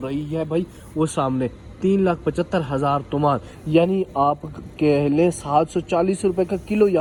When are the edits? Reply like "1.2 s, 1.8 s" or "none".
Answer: none